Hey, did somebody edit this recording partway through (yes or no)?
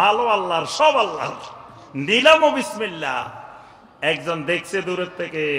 no